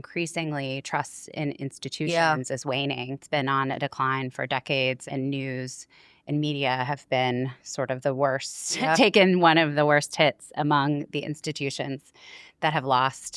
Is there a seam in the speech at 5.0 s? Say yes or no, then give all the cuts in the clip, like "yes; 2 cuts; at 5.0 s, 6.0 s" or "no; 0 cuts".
yes; 2 cuts; at 3.2 s, 5.0 s